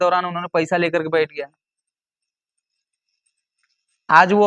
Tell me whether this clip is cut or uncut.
uncut